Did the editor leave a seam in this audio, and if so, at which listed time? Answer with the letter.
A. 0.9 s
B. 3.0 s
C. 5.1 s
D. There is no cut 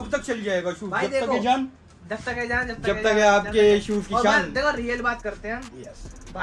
D